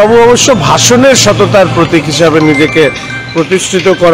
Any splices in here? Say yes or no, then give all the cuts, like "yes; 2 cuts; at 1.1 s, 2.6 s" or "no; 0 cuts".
no; 0 cuts